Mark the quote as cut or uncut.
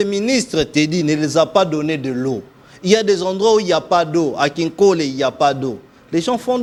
uncut